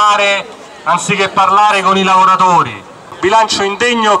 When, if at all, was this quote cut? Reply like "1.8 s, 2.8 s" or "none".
3.2 s